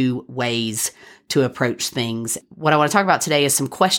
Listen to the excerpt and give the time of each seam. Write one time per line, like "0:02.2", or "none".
0:02.4